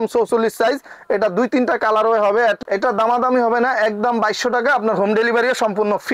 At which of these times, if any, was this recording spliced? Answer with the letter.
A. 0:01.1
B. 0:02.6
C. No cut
B